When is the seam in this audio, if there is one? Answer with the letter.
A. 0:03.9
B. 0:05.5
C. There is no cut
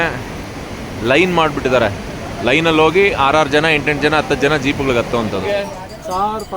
B